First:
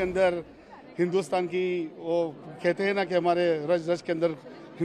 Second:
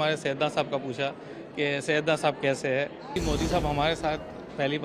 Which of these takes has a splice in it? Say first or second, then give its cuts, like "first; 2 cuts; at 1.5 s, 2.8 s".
second; 1 cut; at 3.2 s